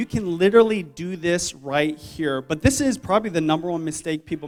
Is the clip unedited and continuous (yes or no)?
yes